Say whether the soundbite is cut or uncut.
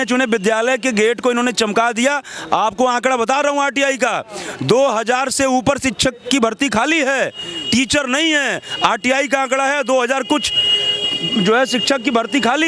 uncut